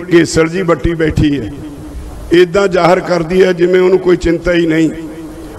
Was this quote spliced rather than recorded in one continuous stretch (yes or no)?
no